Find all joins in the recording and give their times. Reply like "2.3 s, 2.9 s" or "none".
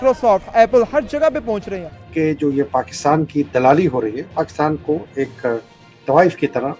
2.0 s